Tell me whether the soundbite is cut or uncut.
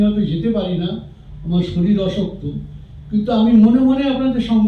uncut